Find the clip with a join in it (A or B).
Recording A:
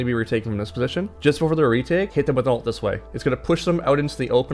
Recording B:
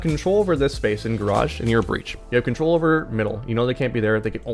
A